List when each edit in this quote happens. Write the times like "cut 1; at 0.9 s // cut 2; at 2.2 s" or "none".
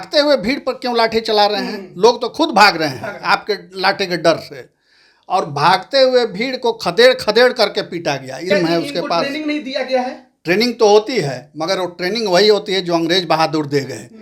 cut 1; at 8.4 s